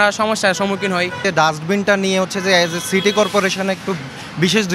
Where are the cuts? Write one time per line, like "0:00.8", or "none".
0:01.2